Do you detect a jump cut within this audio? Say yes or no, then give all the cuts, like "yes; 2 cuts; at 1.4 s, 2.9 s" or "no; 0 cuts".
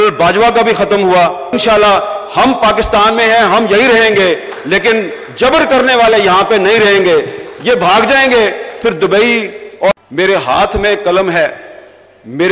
yes; 2 cuts; at 1.4 s, 9.6 s